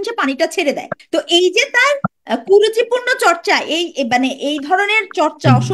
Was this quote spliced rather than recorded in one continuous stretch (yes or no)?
yes